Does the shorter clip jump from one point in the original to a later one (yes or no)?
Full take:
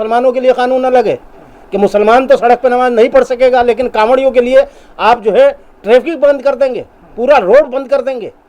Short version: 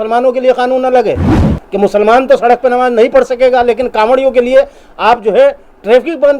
no